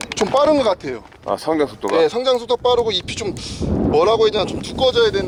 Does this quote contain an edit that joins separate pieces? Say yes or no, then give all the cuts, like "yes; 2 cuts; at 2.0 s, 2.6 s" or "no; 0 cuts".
no; 0 cuts